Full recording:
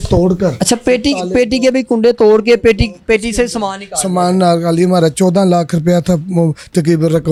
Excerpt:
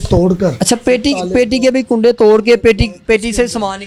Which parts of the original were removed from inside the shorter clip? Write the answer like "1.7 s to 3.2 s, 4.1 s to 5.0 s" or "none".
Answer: none

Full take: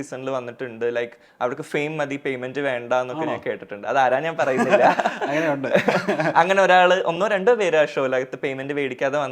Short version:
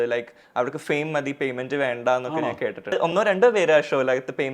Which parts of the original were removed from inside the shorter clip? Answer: 3.8 s to 7.0 s

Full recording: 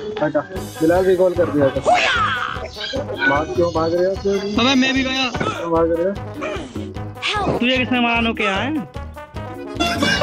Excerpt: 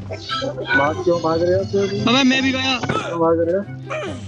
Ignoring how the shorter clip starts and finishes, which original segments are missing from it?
none

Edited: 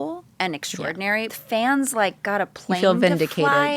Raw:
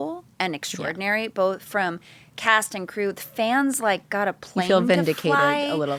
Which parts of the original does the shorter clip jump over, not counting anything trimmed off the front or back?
1.3 s to 3.2 s

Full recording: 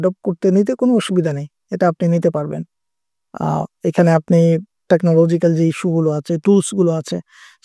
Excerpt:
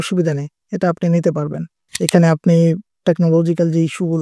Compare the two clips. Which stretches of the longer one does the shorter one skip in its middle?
2.9 s to 3.7 s

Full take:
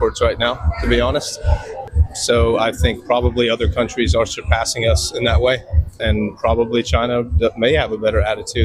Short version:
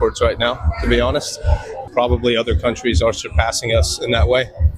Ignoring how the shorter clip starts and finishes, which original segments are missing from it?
1.9 s to 3.0 s

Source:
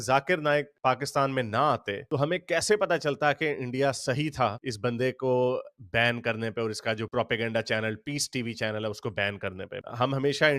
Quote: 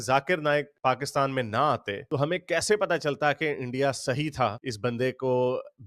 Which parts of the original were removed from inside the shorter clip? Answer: none

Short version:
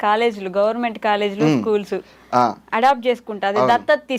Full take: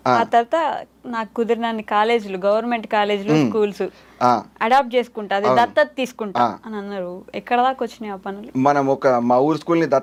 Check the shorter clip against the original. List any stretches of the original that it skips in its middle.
none

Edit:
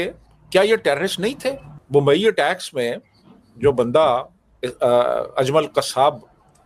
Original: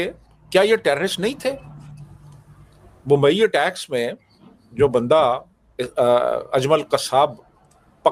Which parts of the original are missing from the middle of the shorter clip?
1.7 s to 2.9 s

